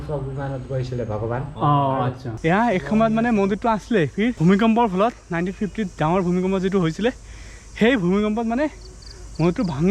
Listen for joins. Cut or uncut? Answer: cut